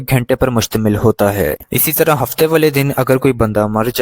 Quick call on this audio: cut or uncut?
cut